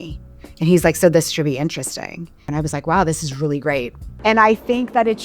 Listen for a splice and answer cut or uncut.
cut